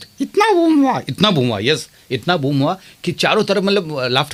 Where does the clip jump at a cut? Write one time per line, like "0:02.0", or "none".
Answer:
none

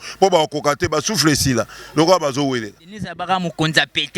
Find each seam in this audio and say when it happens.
0:03.0

